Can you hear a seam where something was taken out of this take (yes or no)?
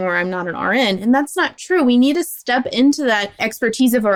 no